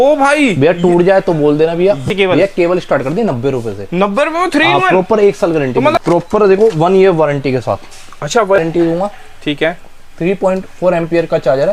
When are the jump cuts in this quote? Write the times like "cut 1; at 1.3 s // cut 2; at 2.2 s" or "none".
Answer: cut 1; at 2.1 s // cut 2; at 5.9 s // cut 3; at 8.6 s